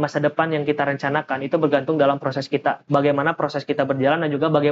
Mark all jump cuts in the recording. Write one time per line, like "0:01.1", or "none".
0:02.8